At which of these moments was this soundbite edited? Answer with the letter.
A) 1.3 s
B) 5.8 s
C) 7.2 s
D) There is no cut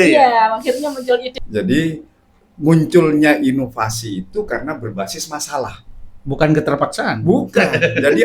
A